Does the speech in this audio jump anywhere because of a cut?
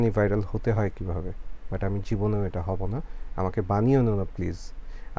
no; 0 cuts

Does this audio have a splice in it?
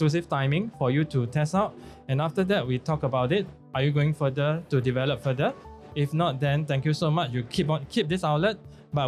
no; 0 cuts

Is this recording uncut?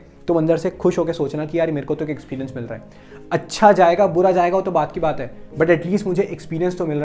yes; 0 cuts

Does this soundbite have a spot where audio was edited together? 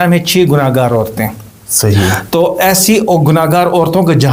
no; 0 cuts

